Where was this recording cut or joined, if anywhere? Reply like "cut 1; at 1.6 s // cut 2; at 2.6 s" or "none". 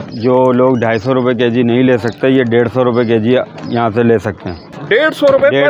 cut 1; at 4.7 s